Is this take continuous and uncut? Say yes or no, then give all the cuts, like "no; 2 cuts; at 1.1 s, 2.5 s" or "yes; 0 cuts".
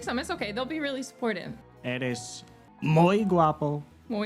no; 1 cut; at 1.6 s